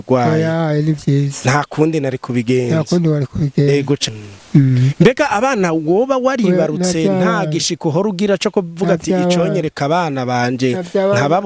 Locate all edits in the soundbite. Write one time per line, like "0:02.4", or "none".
0:04.1